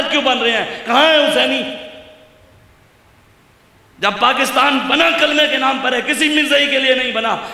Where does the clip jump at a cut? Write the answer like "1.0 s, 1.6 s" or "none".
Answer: none